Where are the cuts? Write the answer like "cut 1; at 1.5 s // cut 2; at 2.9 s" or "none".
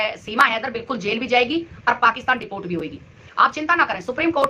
none